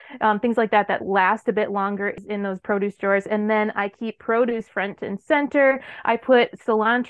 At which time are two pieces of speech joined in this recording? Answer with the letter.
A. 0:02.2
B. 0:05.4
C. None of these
A